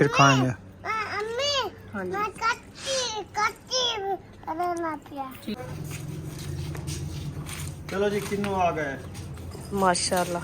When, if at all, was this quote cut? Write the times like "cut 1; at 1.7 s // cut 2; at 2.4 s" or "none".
cut 1; at 5.6 s